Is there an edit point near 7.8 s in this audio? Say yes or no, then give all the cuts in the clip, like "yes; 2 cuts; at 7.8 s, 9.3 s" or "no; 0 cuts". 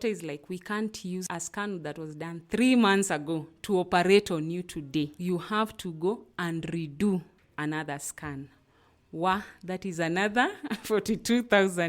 no; 2 cuts; at 1.3 s, 5.2 s